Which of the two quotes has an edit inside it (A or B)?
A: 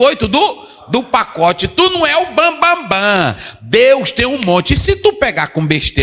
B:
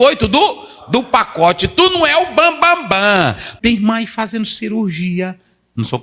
B